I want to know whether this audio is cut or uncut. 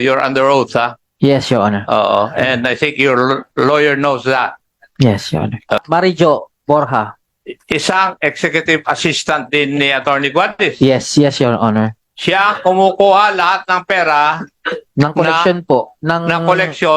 cut